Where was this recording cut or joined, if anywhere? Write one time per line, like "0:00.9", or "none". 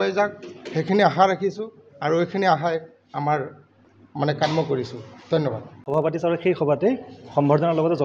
0:05.7

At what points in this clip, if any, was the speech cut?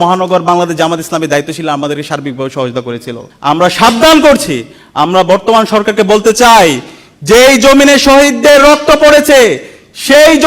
0:03.3

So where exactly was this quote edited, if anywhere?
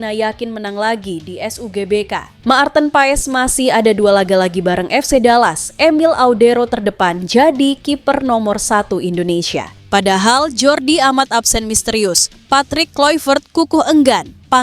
0:02.3
0:09.8

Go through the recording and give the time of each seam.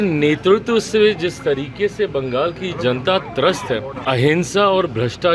0:03.9

